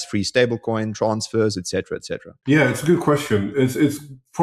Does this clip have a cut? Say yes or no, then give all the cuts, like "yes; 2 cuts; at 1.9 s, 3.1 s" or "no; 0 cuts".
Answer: no; 0 cuts